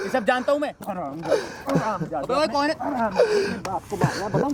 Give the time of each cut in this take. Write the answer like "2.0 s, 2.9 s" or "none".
none